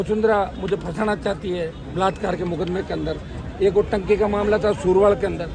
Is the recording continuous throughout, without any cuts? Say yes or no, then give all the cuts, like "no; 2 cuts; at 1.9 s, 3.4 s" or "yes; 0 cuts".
yes; 0 cuts